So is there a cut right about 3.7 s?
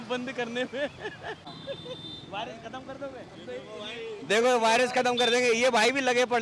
no; 1 cut; at 1.5 s

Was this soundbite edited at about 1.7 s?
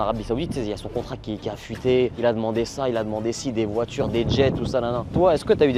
no; 0 cuts

